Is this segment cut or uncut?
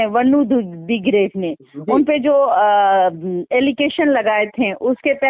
uncut